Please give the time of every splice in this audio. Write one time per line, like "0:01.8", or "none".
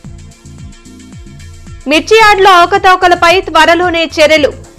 none